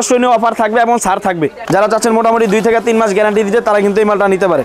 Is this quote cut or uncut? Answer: cut